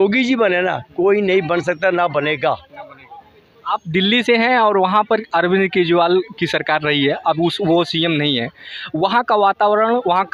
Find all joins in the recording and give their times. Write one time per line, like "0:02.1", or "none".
none

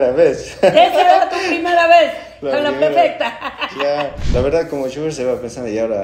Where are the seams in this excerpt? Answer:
0:04.3

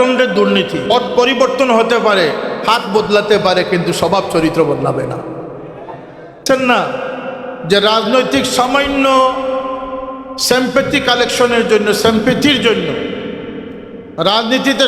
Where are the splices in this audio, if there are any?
0:00.9
0:06.4

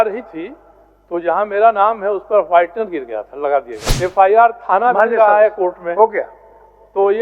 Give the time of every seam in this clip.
0:03.8

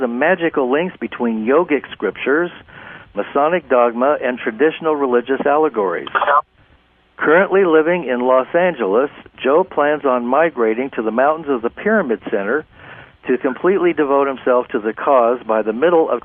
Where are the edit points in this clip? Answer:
0:05.7

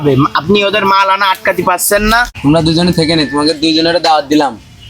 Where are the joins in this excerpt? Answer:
0:02.4

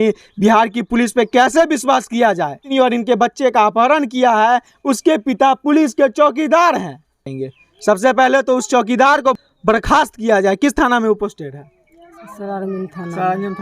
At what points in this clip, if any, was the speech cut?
0:02.7
0:07.2
0:09.5

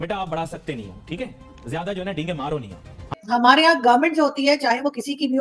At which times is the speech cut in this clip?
0:03.2

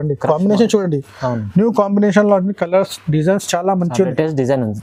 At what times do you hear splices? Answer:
none

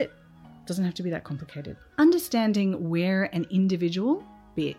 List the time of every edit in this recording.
0:01.8

